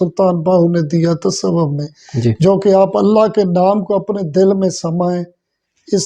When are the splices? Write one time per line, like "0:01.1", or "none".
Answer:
none

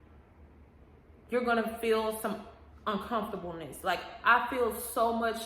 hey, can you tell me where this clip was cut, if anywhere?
none

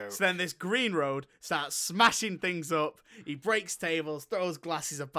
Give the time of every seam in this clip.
none

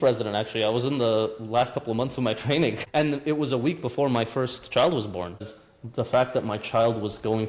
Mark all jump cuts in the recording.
0:05.5

